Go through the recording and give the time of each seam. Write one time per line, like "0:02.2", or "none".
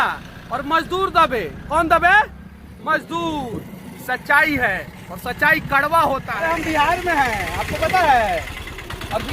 0:06.3